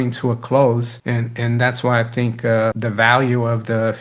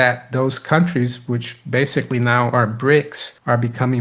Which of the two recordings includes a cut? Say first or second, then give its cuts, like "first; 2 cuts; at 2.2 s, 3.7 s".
first; 1 cut; at 2.8 s